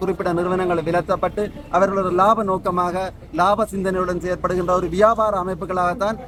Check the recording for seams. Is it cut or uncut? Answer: uncut